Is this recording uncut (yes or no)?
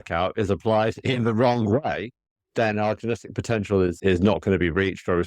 no